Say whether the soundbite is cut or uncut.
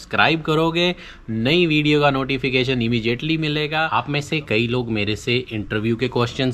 cut